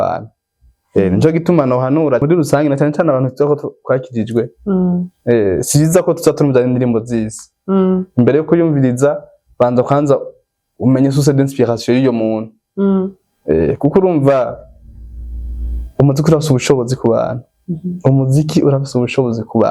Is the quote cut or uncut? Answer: cut